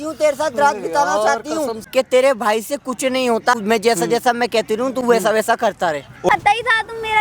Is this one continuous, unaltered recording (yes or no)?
no